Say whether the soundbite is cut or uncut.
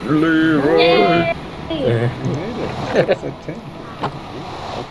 uncut